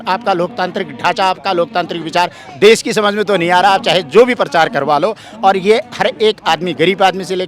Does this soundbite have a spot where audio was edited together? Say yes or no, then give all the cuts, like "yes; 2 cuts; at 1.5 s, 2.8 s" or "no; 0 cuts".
no; 0 cuts